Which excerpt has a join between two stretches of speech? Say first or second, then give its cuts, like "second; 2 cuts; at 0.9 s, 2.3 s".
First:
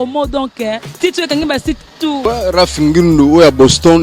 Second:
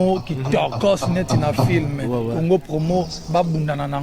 first; 1 cut; at 2.2 s